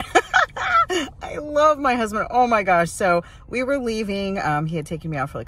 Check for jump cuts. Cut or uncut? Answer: cut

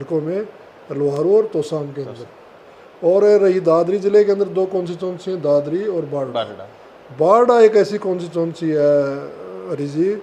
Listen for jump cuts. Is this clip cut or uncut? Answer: uncut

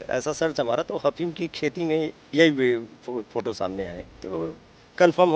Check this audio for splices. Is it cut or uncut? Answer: cut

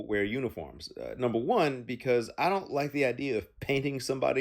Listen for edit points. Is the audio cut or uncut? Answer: cut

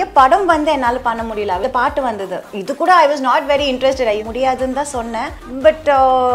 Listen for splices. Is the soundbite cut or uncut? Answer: cut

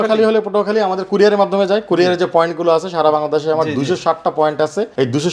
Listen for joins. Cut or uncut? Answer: uncut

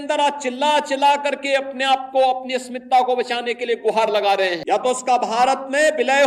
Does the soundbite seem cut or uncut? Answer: cut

